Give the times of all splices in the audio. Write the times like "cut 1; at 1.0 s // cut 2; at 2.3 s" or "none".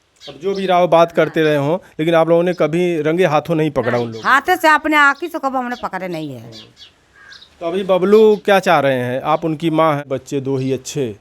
cut 1; at 10.0 s